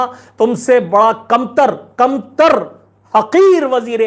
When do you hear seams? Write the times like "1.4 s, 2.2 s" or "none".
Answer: none

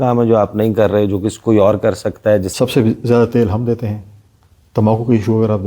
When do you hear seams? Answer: 2.5 s

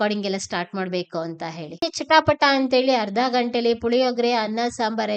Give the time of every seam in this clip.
1.9 s

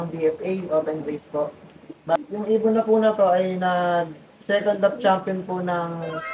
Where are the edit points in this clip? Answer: 2.2 s

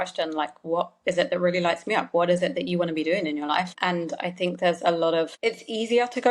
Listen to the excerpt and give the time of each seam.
3.7 s, 5.3 s

